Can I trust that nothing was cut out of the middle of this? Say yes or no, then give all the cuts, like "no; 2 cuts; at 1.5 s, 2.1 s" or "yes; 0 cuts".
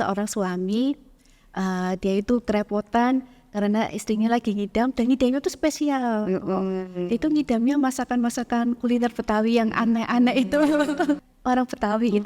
no; 1 cut; at 11.3 s